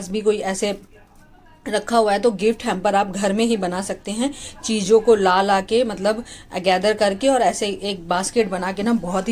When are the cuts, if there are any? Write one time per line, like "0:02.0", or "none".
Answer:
none